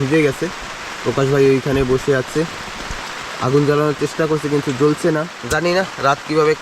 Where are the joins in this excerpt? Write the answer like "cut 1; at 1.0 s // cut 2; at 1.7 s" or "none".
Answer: cut 1; at 5.4 s